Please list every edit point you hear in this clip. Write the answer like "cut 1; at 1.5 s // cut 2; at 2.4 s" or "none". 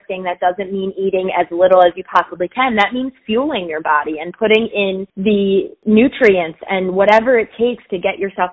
cut 1; at 5.1 s // cut 2; at 5.7 s